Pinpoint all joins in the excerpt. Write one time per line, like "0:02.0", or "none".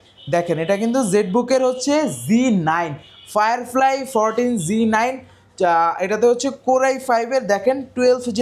none